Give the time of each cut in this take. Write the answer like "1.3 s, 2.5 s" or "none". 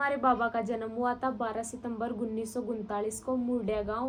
none